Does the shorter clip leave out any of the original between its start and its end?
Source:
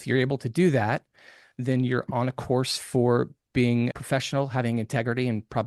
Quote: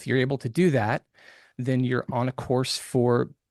no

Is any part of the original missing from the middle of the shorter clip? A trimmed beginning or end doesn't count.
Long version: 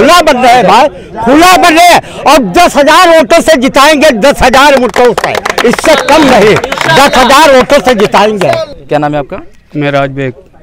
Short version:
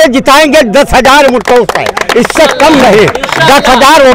no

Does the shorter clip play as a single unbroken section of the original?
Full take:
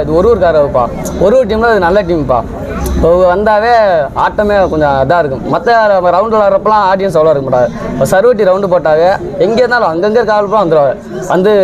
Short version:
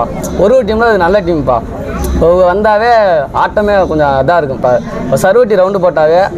no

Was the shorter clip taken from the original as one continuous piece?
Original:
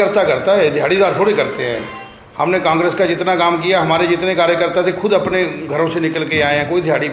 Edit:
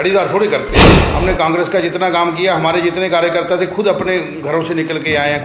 no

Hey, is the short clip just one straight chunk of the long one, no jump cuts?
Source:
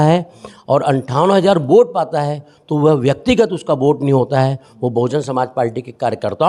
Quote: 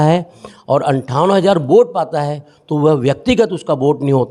yes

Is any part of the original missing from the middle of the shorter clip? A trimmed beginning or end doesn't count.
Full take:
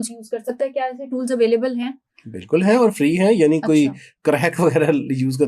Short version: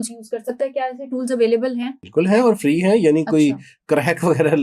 yes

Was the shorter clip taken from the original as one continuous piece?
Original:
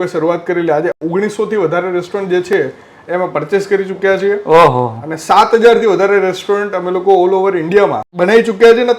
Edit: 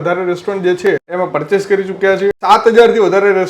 no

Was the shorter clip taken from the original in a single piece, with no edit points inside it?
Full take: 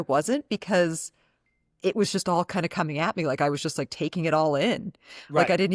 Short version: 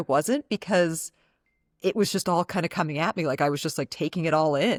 yes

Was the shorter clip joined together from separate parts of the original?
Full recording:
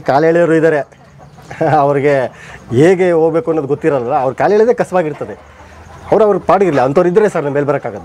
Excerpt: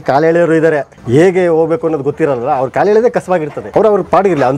yes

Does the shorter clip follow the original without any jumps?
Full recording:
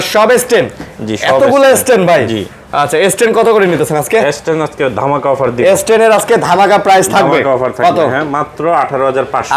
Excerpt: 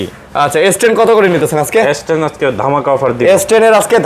yes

